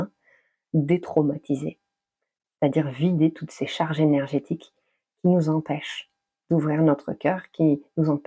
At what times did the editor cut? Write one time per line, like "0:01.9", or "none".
none